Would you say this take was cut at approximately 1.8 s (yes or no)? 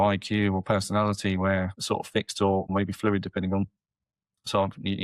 yes